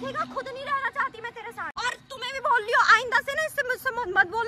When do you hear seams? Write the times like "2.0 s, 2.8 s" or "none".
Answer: 1.7 s